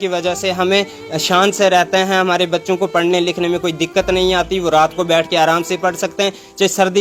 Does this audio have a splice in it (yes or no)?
no